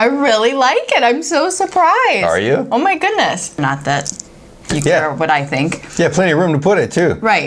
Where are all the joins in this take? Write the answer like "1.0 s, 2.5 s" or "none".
3.6 s